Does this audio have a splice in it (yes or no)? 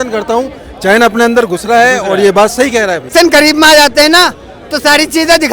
yes